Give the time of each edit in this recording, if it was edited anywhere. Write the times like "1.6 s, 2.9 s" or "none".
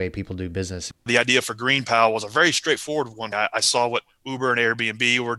1.1 s, 3.2 s